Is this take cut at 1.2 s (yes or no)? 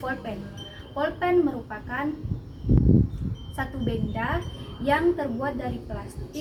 no